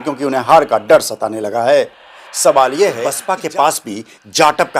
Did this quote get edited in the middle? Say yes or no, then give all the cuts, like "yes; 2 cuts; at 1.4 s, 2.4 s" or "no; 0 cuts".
yes; 1 cut; at 3.2 s